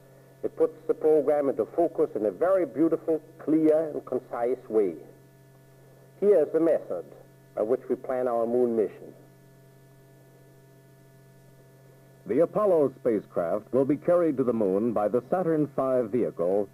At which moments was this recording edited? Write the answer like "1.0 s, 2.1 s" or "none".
none